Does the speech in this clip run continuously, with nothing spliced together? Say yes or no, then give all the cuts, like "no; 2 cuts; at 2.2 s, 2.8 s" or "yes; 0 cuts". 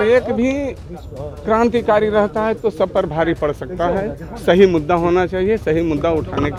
yes; 0 cuts